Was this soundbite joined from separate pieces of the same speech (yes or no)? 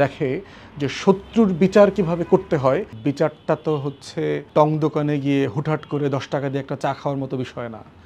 yes